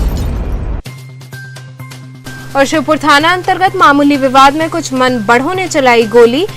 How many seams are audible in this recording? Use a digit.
1